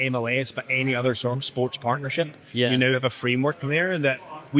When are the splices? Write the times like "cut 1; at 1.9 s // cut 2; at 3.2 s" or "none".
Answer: none